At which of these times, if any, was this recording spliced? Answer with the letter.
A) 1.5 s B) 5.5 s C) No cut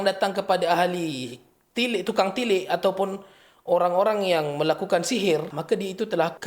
B